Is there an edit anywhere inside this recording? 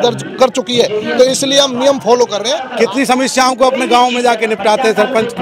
yes; 1 cut; at 2.6 s

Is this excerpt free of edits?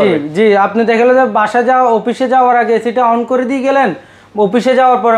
yes; 0 cuts

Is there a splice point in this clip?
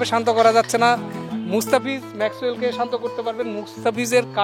no; 0 cuts

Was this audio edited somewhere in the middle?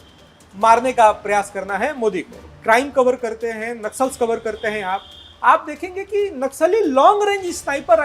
yes; 1 cut; at 2.5 s

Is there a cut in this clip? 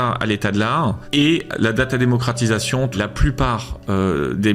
yes; 2 cuts; at 1.0 s, 2.9 s

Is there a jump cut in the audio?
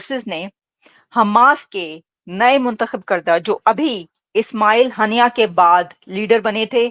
no; 0 cuts

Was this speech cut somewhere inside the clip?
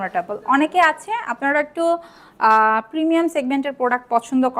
no; 0 cuts

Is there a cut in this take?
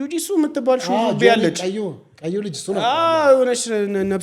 no; 0 cuts

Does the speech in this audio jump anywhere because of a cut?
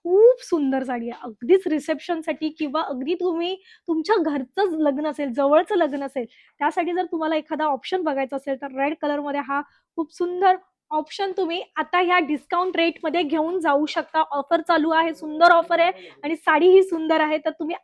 no; 0 cuts

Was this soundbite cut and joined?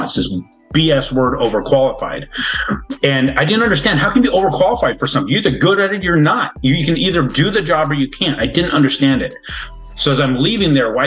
no; 0 cuts

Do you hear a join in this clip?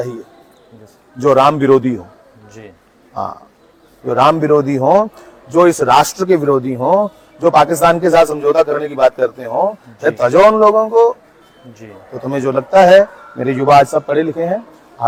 no; 0 cuts

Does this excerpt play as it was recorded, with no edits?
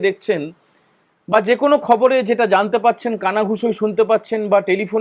yes; 0 cuts

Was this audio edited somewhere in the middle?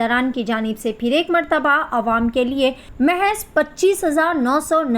yes; 1 cut; at 2.8 s

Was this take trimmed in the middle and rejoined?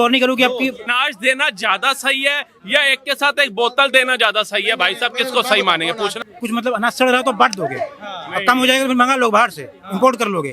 yes; 2 cuts; at 0.9 s, 6.3 s

